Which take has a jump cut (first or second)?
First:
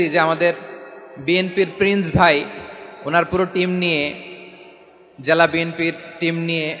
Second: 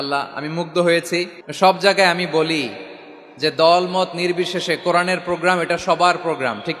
second